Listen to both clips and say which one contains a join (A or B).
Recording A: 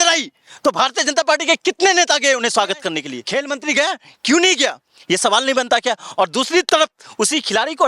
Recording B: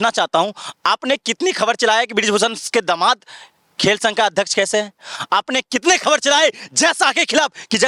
A